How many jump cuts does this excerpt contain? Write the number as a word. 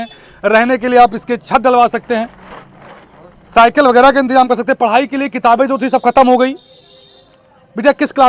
zero